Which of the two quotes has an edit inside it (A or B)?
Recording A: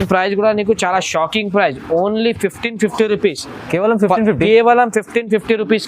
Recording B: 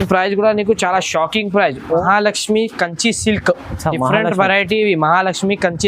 B